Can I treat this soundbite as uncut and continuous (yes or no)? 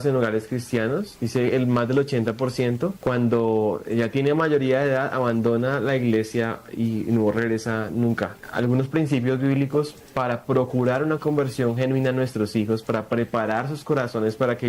no